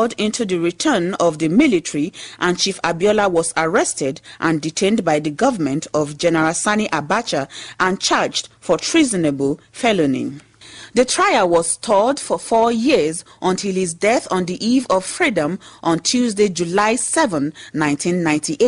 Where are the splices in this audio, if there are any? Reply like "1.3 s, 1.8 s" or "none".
none